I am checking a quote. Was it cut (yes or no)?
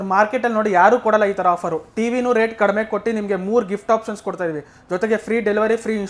no